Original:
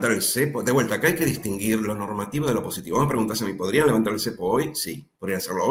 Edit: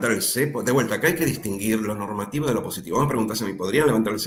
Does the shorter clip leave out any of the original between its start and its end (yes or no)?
no